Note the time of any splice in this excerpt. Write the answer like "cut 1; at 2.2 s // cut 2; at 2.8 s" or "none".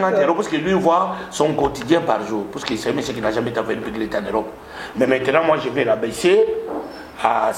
none